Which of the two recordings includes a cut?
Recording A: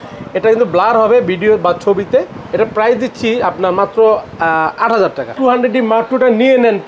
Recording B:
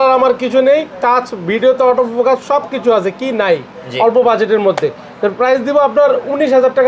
A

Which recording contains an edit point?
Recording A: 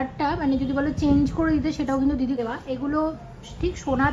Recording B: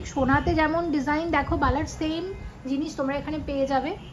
A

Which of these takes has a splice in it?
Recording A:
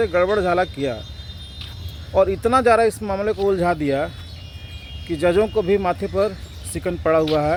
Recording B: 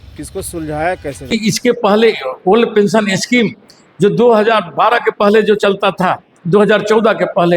B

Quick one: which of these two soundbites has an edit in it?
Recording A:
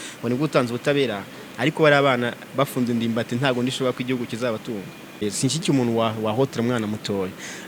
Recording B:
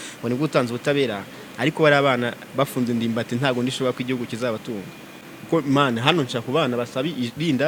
A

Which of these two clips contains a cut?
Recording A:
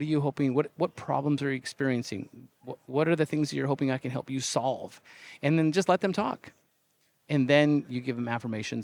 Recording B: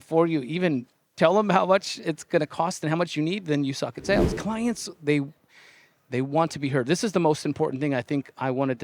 B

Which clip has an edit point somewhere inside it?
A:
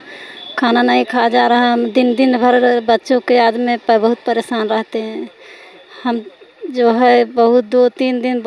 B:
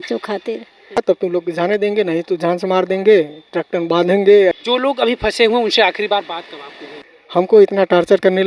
B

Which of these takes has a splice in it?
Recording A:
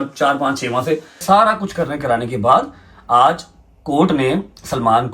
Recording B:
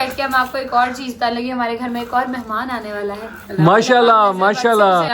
A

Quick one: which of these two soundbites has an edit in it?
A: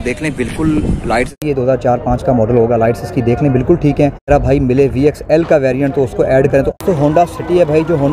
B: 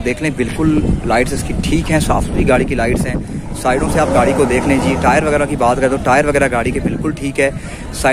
A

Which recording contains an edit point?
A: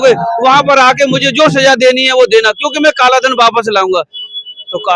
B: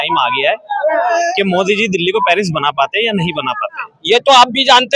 B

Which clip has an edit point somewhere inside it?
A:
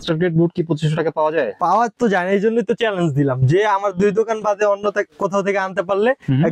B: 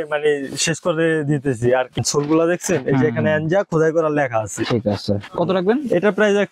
B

